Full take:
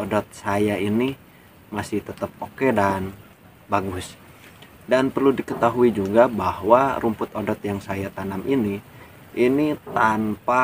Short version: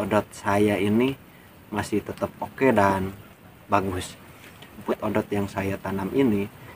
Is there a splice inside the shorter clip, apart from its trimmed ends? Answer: yes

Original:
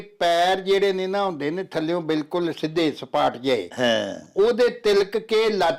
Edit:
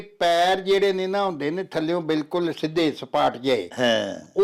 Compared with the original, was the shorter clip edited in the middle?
no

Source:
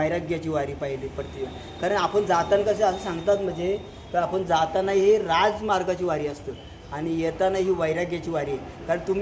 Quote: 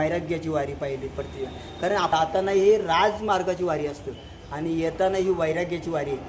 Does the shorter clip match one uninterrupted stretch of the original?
no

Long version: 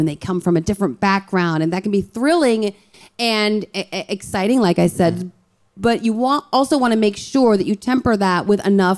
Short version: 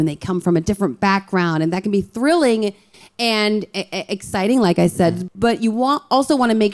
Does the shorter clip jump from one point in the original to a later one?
yes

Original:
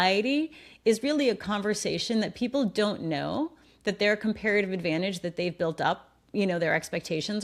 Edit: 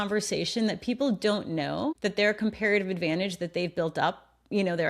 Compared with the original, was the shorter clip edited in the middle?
yes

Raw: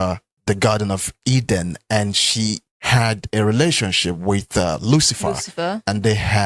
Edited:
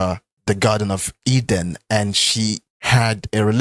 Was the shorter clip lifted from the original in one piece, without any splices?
yes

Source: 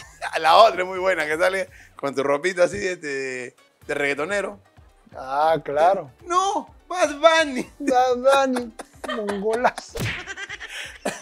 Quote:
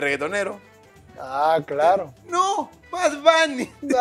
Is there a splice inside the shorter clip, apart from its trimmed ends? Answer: no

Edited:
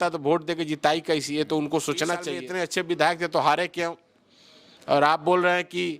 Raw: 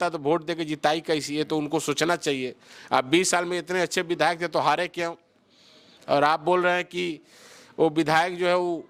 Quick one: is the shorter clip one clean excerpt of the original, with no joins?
no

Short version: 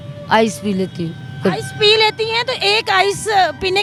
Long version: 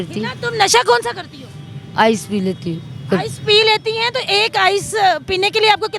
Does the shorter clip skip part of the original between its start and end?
no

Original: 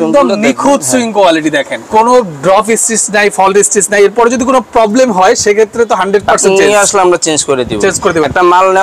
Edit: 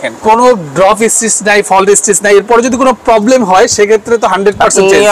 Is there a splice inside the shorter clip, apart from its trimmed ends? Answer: no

